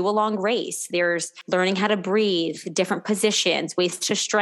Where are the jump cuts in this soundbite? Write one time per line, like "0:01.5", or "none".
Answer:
0:01.3